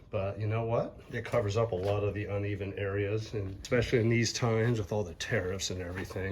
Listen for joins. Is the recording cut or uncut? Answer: cut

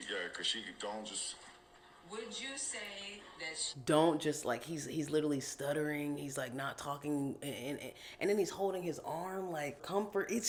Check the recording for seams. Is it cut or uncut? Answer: uncut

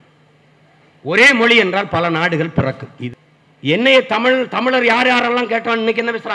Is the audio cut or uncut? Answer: cut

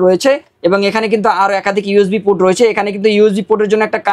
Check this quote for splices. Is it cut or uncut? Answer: uncut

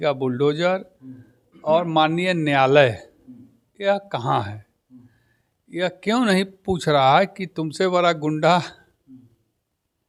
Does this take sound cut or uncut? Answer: uncut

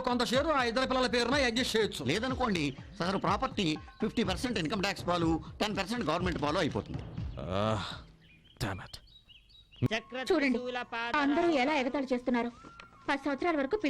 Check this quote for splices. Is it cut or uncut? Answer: cut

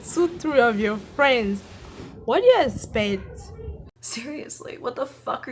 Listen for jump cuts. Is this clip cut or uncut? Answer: cut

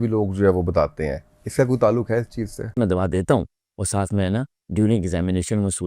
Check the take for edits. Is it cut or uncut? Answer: cut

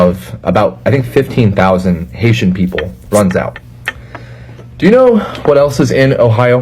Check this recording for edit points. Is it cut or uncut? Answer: cut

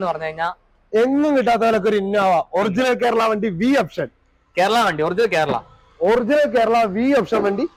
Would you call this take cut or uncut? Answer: uncut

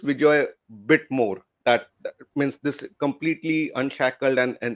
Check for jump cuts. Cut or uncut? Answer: uncut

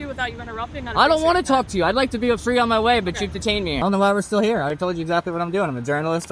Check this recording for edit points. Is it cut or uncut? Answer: cut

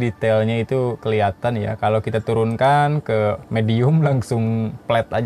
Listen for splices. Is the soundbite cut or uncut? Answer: uncut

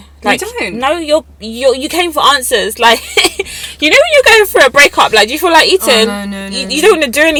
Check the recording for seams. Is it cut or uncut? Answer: uncut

